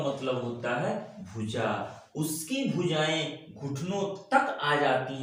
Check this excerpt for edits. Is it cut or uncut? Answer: uncut